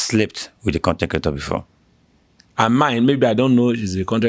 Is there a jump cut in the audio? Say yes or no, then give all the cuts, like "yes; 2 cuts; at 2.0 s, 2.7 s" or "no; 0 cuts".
no; 0 cuts